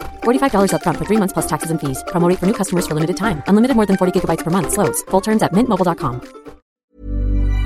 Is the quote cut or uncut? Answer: cut